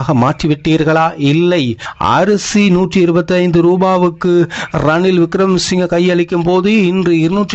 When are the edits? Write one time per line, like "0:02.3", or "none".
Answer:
0:01.9